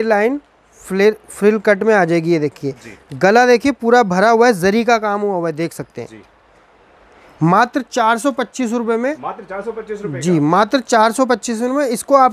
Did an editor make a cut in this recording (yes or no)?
no